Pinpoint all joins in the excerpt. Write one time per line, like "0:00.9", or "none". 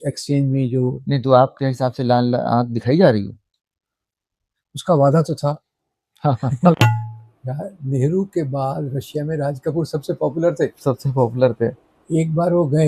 0:06.8